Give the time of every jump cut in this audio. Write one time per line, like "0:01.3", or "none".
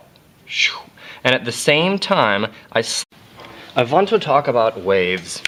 none

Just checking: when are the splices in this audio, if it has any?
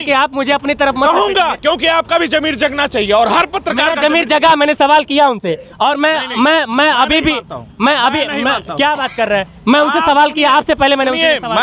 none

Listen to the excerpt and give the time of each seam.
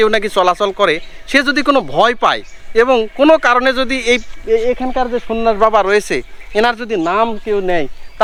none

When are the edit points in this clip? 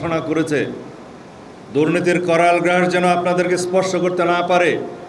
none

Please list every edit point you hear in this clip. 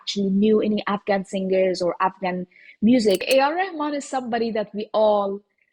0:03.2

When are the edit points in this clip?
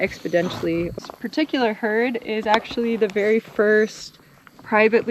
0:00.9

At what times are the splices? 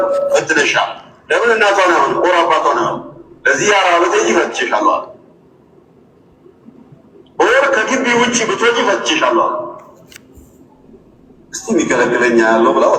none

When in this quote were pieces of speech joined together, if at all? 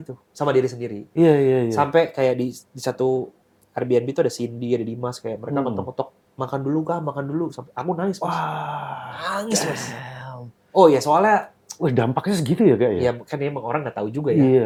none

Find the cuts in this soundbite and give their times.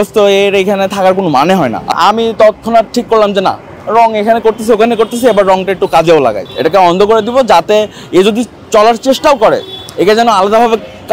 0:01.8
0:06.5

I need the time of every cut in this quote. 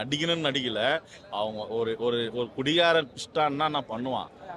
none

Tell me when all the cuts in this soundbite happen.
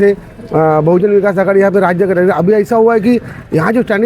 none

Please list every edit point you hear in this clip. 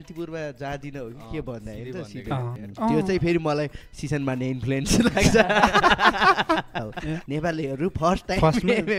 0:02.6
0:06.9

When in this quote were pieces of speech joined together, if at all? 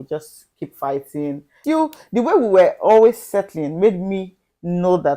0:01.6

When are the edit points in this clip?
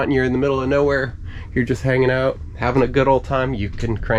none

